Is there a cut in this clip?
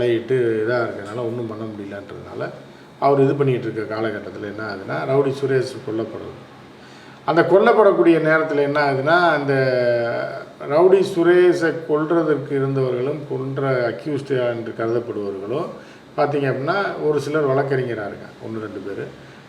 no; 0 cuts

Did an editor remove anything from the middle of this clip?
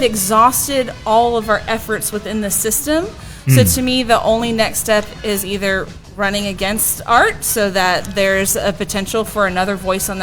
no; 0 cuts

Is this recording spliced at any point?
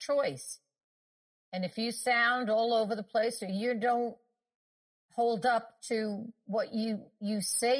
no; 0 cuts

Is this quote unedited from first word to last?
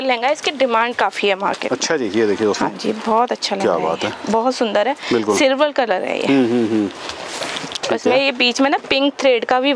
yes; 0 cuts

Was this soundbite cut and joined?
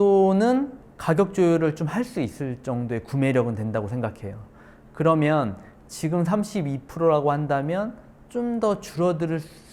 no; 0 cuts

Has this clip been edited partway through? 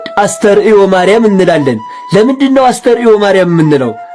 no; 0 cuts

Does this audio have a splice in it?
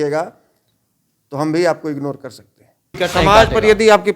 yes; 1 cut; at 3.0 s

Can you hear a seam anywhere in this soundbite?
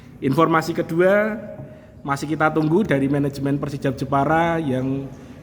no; 0 cuts

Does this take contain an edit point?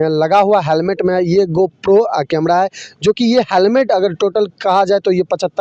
no; 0 cuts

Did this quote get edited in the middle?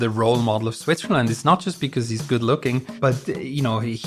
yes; 1 cut; at 2.9 s

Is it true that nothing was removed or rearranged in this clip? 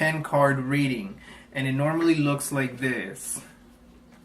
no; 1 cut; at 2.1 s

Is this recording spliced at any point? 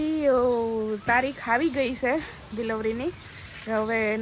no; 0 cuts

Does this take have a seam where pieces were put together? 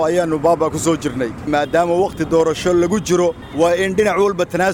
yes; 2 cuts; at 1.5 s, 3.4 s

